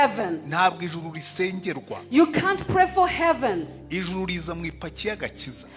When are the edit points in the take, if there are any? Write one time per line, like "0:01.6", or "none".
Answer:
none